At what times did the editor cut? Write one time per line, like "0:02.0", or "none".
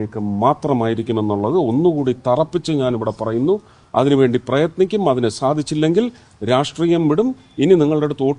none